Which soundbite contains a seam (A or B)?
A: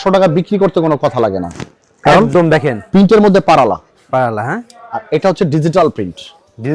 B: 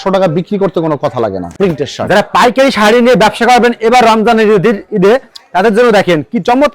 B